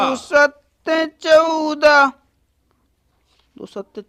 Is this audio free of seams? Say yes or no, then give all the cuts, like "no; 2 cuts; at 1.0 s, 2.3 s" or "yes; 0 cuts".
yes; 0 cuts